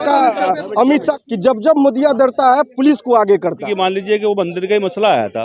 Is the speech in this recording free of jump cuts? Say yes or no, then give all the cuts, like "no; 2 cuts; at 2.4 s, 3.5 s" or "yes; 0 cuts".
no; 2 cuts; at 1.1 s, 3.6 s